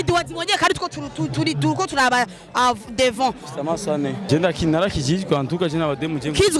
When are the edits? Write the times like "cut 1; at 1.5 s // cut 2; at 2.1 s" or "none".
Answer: cut 1; at 4.2 s